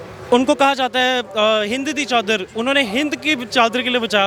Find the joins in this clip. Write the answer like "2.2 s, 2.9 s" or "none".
none